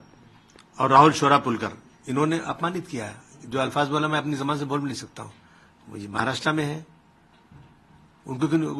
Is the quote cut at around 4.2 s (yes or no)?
no